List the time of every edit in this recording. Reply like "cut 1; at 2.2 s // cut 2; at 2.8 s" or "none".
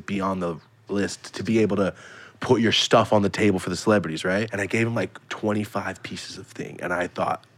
cut 1; at 1.3 s // cut 2; at 4.6 s